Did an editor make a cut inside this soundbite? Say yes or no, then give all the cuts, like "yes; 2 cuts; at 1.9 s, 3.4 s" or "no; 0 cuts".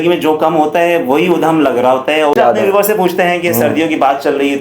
yes; 1 cut; at 2.3 s